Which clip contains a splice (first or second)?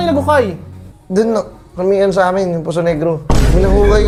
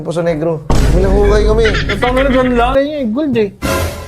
second